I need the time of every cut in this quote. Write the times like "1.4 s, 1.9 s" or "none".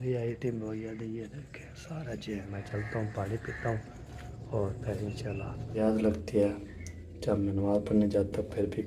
2.5 s, 5.8 s